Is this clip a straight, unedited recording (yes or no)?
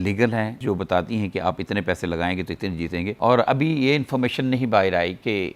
no